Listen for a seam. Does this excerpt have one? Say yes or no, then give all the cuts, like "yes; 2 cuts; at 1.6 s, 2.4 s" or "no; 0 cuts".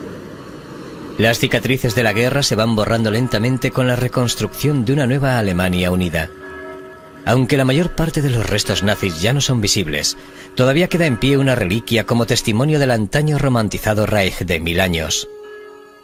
no; 0 cuts